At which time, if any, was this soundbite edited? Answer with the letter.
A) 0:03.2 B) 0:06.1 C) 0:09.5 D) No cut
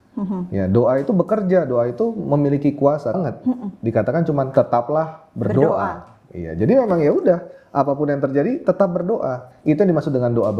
A